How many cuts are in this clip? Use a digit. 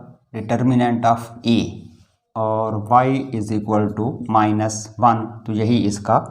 1